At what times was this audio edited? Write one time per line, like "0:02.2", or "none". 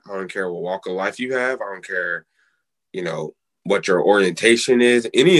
none